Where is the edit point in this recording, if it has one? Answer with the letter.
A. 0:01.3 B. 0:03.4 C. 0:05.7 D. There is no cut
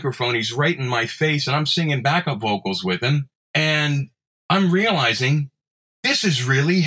B